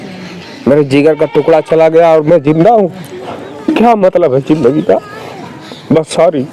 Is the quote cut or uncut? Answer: uncut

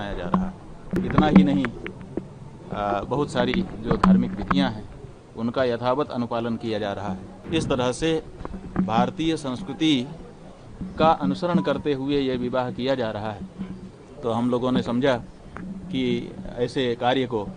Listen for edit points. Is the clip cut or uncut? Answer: cut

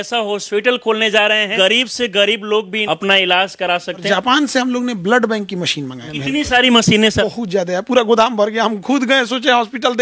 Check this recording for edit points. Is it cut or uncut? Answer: cut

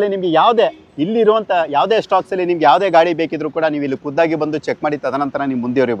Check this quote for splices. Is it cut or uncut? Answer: uncut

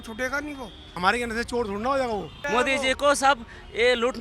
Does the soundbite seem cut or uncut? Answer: cut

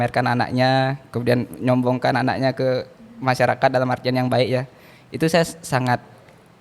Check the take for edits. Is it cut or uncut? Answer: uncut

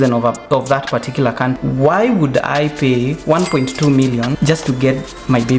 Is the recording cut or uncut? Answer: cut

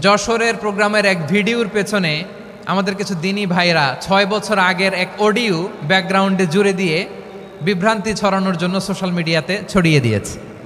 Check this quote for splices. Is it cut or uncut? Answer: uncut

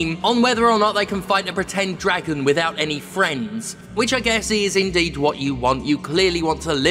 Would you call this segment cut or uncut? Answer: cut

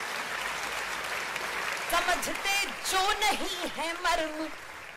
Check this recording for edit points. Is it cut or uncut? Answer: cut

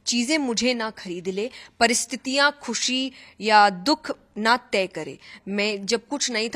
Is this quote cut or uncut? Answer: uncut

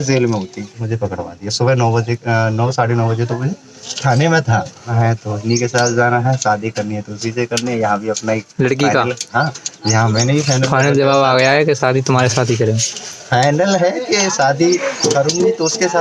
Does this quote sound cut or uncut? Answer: cut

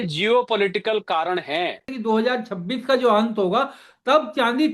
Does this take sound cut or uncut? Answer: cut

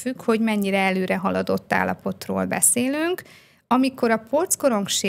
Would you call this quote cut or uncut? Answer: uncut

